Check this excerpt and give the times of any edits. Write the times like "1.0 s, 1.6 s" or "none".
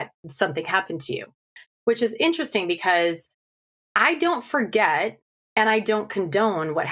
1.3 s